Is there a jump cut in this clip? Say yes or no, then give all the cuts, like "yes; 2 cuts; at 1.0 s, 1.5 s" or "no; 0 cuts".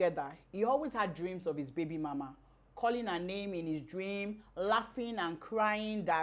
no; 0 cuts